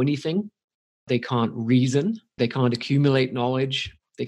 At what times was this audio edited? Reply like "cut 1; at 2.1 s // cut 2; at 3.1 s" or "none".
cut 1; at 1.1 s // cut 2; at 2.3 s

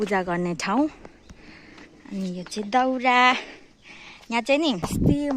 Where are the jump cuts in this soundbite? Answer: none

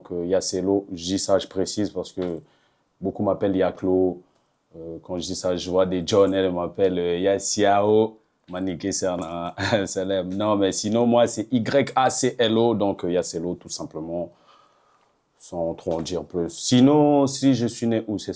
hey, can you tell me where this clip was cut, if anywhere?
none

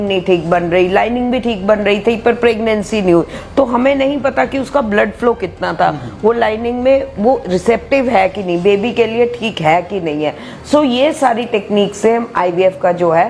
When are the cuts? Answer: none

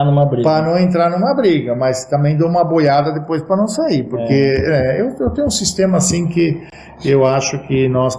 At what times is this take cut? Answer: none

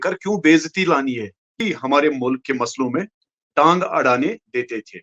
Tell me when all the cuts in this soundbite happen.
cut 1; at 1.6 s

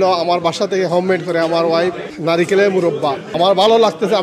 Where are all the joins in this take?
cut 1; at 2.1 s // cut 2; at 3.2 s

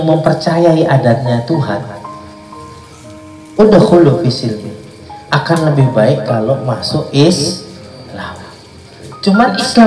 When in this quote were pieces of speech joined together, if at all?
none

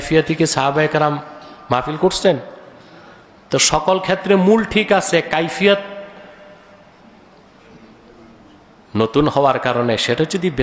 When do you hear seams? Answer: none

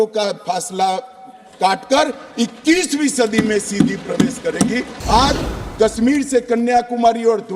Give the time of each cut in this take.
cut 1; at 4.9 s

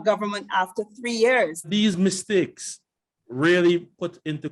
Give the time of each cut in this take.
cut 1; at 1.7 s

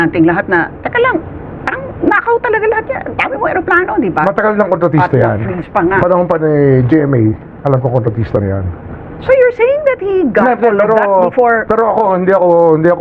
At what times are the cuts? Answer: none

